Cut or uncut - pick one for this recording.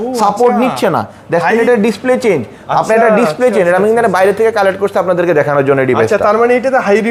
uncut